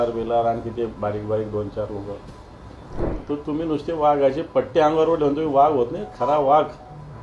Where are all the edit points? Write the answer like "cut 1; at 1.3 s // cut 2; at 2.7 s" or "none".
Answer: cut 1; at 3.1 s